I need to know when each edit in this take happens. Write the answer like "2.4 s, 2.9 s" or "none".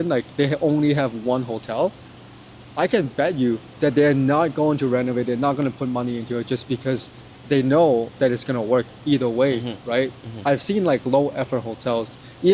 none